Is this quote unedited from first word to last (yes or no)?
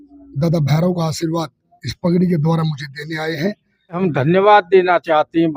no